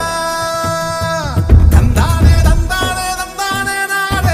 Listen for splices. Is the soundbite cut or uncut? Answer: uncut